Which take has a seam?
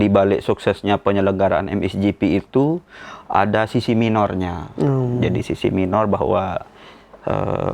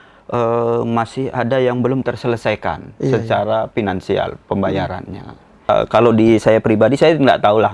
second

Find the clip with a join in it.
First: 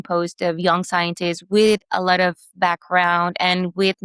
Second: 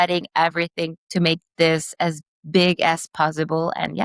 second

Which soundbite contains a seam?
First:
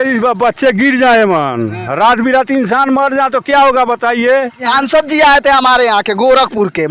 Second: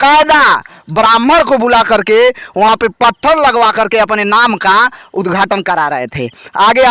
first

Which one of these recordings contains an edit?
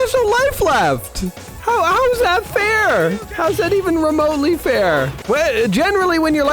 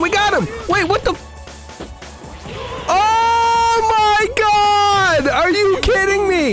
first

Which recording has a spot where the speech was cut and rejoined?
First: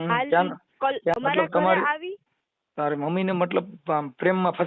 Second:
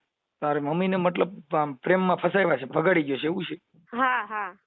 first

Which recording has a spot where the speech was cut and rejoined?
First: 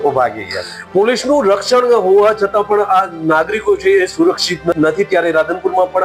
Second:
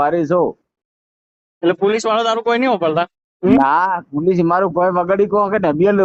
first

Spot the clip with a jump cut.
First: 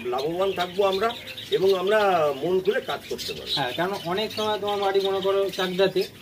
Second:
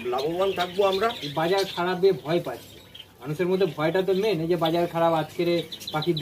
second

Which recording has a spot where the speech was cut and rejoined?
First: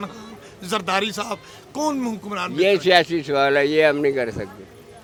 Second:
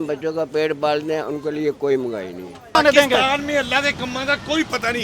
second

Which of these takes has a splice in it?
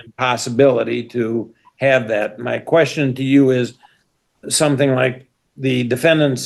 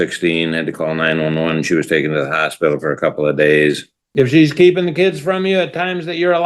second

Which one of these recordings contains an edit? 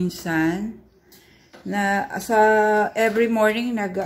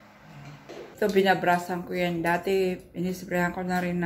second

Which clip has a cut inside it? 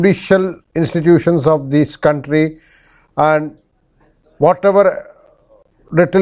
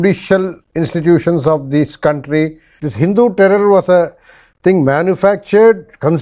second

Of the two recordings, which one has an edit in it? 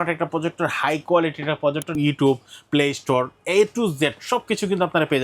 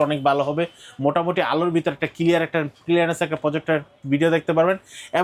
first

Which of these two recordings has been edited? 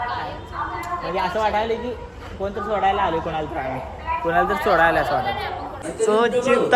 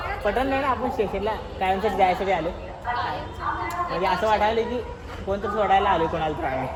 first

